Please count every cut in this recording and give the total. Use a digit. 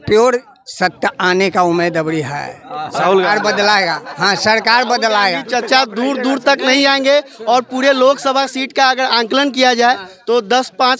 0